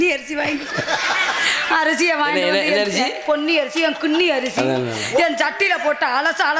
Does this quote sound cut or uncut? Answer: uncut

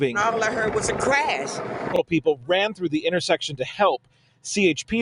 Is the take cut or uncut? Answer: cut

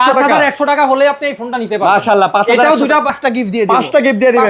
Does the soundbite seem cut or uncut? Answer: cut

